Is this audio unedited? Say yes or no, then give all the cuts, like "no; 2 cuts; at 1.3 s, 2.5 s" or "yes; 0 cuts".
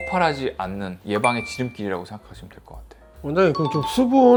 yes; 0 cuts